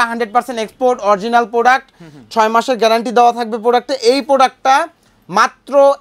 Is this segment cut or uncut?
uncut